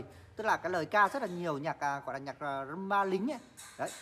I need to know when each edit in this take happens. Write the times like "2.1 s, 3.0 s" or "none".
none

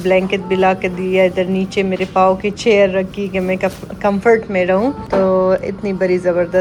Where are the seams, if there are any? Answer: none

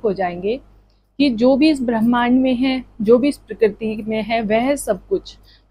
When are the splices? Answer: none

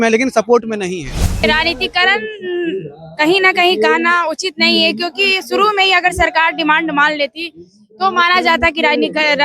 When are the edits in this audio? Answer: 1.4 s

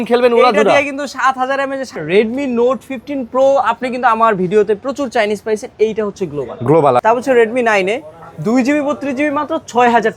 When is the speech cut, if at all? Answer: 1.9 s, 7.0 s

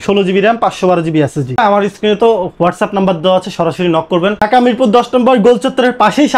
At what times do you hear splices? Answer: 1.6 s, 4.4 s

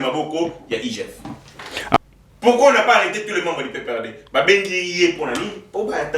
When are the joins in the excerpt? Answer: 2.0 s

